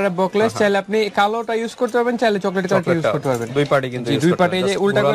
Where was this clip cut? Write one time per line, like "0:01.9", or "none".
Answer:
none